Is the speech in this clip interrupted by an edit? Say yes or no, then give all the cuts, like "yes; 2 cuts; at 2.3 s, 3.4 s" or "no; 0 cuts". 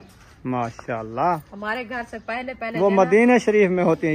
no; 0 cuts